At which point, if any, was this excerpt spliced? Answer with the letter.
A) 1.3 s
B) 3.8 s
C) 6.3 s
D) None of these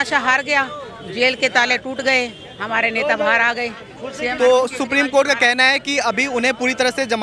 D